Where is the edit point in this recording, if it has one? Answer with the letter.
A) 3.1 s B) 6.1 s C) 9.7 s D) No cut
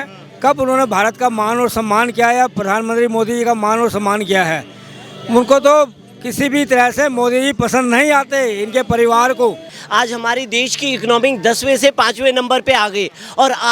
C